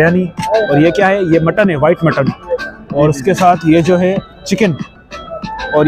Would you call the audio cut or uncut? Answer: uncut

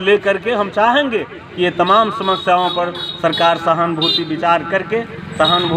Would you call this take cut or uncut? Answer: uncut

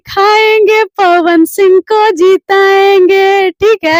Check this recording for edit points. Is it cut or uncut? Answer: uncut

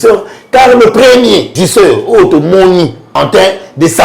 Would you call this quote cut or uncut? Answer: cut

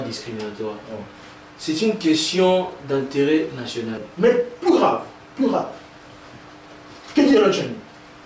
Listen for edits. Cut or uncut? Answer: cut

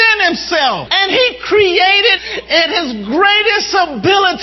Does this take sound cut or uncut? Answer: cut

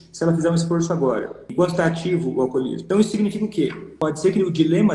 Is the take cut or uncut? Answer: cut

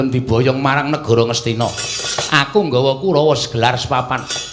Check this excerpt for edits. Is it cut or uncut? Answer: uncut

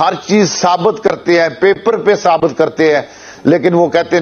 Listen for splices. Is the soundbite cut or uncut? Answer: uncut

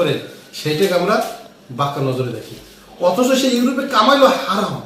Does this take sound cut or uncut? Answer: uncut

